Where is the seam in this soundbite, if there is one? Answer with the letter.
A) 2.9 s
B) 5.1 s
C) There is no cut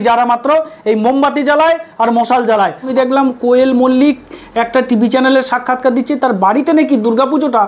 A